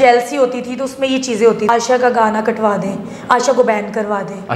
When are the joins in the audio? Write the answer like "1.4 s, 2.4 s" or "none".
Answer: 1.7 s